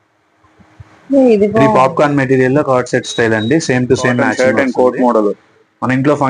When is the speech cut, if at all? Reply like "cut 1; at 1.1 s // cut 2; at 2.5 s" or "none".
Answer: cut 1; at 1.7 s // cut 2; at 4.3 s